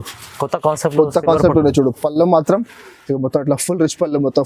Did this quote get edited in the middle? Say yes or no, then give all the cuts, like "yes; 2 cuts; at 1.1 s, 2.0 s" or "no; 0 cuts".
no; 0 cuts